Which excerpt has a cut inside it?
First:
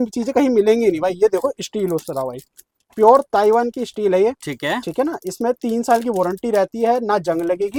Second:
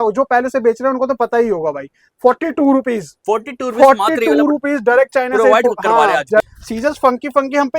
second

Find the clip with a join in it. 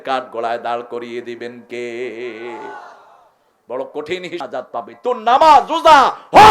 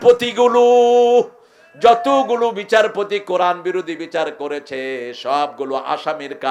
first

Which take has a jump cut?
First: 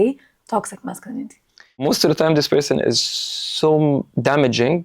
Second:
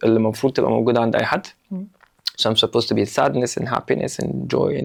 first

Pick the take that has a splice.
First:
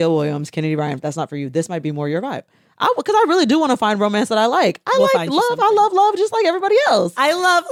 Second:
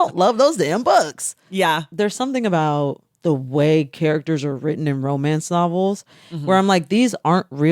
second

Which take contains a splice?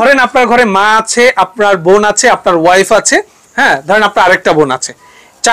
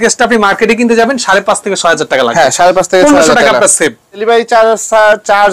second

